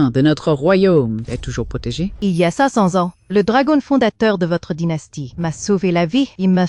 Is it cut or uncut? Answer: cut